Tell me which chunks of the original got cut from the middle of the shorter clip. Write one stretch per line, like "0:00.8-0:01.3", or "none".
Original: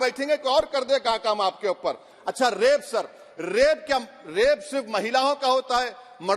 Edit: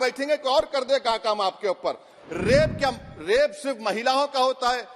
0:02.2-0:03.2